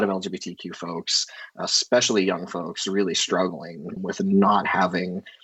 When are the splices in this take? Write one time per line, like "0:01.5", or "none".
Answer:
none